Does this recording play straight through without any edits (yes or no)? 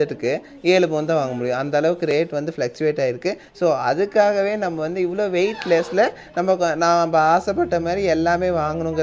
yes